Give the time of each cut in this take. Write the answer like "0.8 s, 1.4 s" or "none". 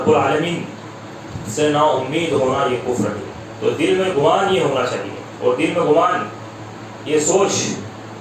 none